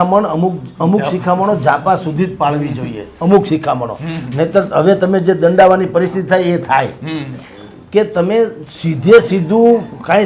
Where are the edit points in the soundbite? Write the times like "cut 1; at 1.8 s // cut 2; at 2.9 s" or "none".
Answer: none